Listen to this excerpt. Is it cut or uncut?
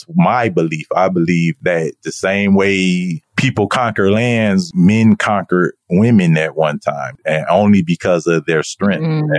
uncut